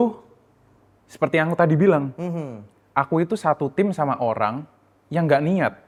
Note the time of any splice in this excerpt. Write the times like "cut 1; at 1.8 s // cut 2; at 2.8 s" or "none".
none